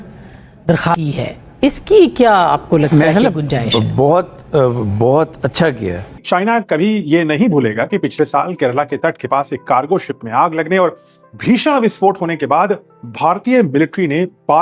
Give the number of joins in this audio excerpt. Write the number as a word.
one